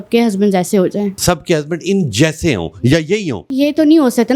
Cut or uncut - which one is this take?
cut